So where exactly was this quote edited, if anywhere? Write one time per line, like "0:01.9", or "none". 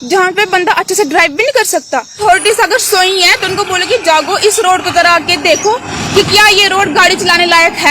0:02.2